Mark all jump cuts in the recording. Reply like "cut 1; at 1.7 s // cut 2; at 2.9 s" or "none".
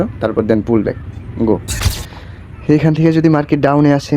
cut 1; at 1.8 s